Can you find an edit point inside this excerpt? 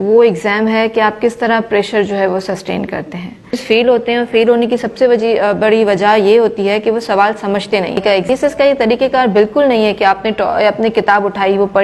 yes; 2 cuts; at 3.6 s, 8.3 s

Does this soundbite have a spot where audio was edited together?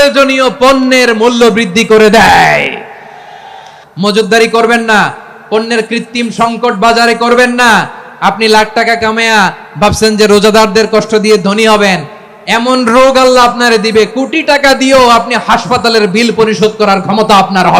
yes; 1 cut; at 3.7 s

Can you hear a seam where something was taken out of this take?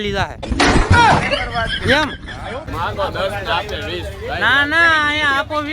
yes; 1 cut; at 2.6 s

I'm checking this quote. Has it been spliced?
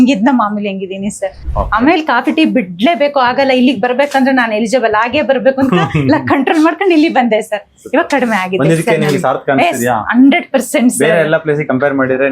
yes; 1 cut; at 1.4 s

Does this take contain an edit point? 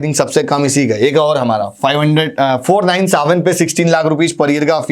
no; 0 cuts

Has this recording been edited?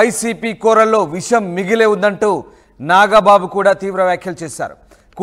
yes; 1 cut; at 2.0 s

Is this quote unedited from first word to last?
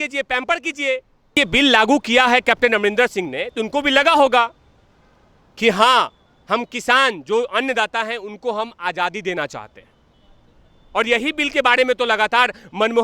no; 1 cut; at 1.4 s

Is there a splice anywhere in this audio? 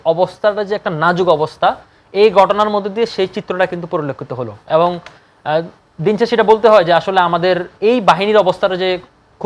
no; 0 cuts

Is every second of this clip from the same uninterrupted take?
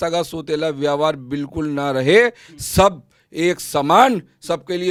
yes; 0 cuts

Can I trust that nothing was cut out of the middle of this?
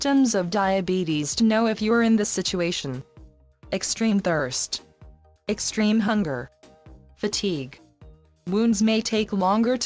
yes; 0 cuts

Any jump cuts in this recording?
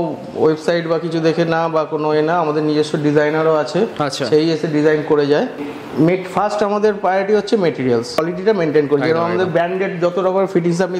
yes; 2 cuts; at 5.6 s, 8.2 s

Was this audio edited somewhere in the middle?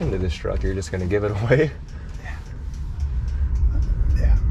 no; 0 cuts

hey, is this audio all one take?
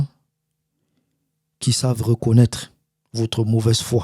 yes; 0 cuts

